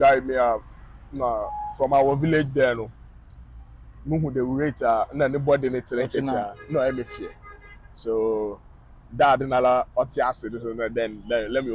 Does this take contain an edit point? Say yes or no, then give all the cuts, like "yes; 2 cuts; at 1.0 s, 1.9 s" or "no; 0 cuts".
no; 0 cuts